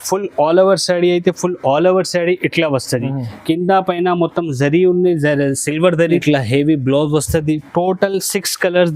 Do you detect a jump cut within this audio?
yes; 1 cut; at 6.2 s

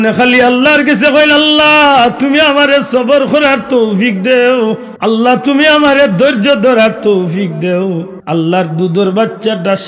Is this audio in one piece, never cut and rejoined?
no; 2 cuts; at 4.9 s, 8.1 s

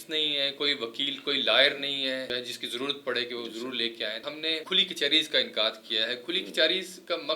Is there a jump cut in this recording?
yes; 2 cuts; at 2.3 s, 4.2 s

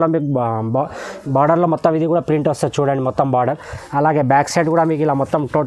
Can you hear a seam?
no; 0 cuts

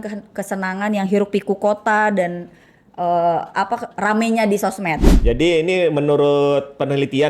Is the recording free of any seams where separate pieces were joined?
no; 1 cut; at 5.1 s

